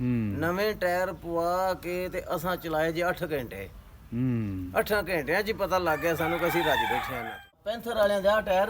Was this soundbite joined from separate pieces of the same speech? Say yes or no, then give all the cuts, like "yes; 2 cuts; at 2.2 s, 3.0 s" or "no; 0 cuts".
yes; 1 cut; at 7.6 s